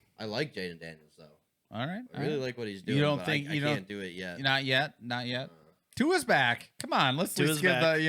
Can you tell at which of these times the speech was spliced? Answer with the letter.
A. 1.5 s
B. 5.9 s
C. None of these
B